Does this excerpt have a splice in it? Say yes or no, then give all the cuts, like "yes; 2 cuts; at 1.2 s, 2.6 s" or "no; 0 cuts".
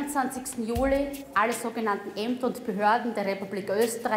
no; 0 cuts